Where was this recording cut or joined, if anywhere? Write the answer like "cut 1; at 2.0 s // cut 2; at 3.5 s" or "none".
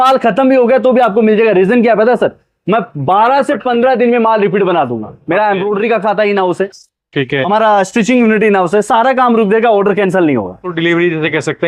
cut 1; at 10.7 s